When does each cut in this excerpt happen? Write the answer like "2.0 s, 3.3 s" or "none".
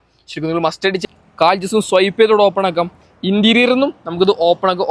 1.0 s